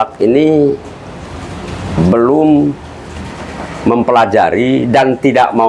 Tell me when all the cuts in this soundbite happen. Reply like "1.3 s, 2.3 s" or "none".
none